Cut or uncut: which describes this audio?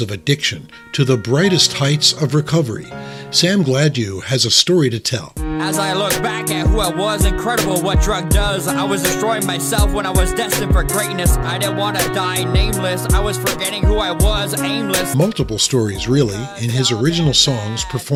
uncut